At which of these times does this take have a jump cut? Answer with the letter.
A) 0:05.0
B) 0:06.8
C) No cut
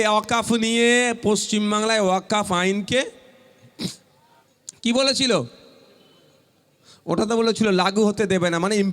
C